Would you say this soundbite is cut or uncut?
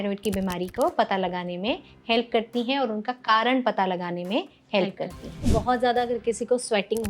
cut